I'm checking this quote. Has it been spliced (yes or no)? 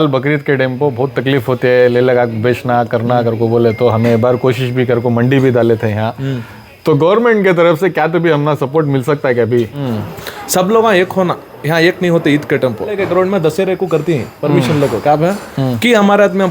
yes